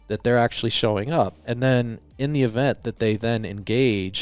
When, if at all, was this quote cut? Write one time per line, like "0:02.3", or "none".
none